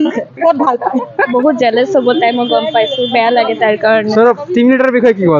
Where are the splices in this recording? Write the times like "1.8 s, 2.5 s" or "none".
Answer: 1.3 s